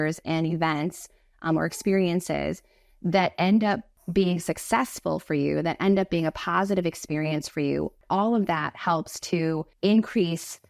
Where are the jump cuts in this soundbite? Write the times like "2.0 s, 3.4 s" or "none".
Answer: 3.9 s, 8.0 s, 9.7 s